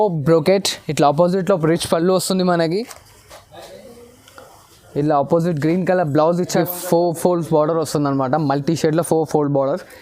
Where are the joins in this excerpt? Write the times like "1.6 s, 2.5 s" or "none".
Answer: 6.6 s